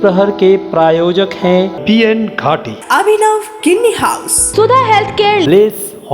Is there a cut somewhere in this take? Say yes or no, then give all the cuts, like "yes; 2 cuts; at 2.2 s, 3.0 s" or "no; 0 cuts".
yes; 1 cut; at 4.4 s